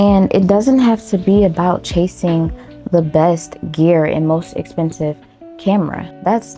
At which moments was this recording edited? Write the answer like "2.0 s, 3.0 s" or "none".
none